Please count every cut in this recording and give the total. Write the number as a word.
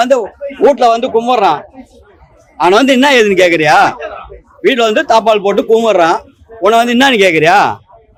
zero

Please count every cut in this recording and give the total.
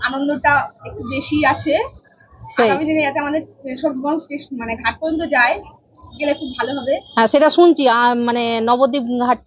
zero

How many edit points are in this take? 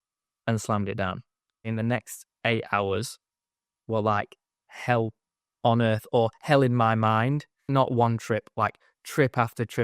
two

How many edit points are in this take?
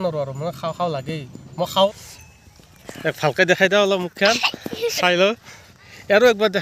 one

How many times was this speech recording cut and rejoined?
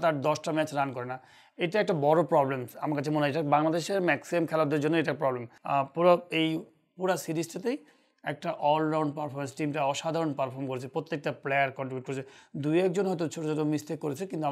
one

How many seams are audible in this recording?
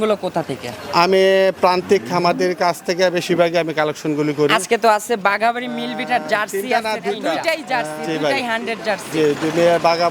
one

